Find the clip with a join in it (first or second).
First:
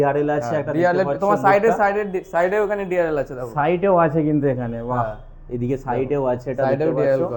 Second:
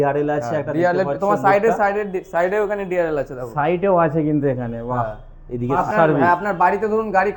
second